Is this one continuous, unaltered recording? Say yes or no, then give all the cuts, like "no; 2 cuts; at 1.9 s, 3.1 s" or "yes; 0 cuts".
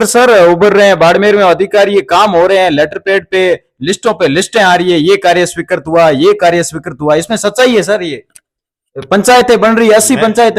yes; 0 cuts